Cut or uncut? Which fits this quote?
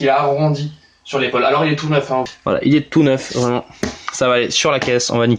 cut